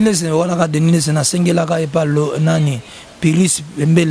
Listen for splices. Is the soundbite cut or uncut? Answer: uncut